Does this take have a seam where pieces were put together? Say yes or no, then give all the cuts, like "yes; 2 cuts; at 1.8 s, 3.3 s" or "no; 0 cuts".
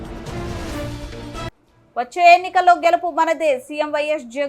no; 0 cuts